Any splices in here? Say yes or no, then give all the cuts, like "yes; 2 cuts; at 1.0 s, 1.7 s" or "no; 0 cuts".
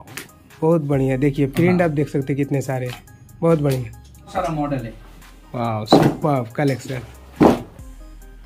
yes; 1 cut; at 4.3 s